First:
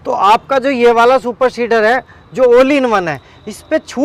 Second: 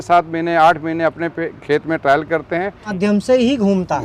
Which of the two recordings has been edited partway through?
second; 1 cut; at 2.9 s

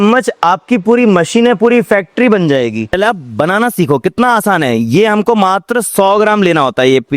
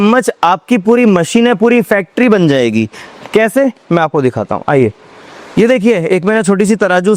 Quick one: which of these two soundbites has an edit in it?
first; 1 cut; at 2.9 s

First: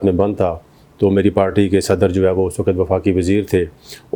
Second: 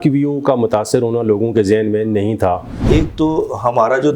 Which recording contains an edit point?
second; 1 cut; at 2.8 s

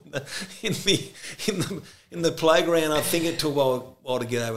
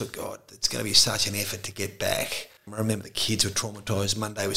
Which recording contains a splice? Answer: second; 1 cut; at 2.7 s

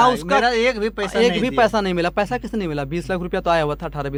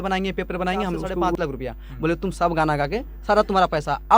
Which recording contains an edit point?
second; 1 cut; at 1.3 s

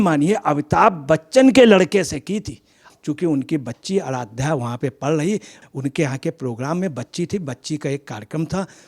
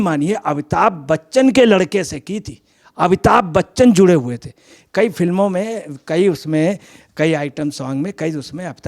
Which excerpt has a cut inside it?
first; 2 cuts; at 2.8 s, 5.6 s

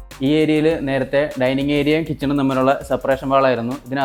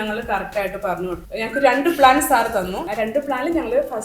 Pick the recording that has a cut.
second; 2 cuts; at 1.2 s, 2.8 s

